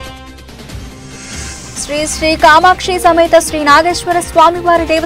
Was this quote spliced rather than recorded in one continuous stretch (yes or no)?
no